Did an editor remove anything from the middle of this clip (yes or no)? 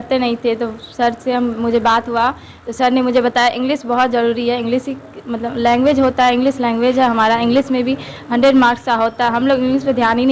no